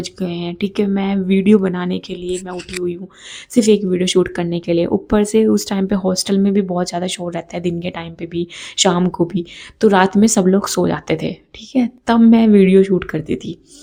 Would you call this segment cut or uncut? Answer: uncut